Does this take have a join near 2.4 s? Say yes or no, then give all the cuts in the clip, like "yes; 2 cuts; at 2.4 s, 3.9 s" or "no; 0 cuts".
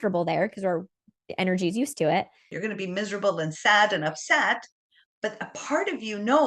yes; 1 cut; at 2.4 s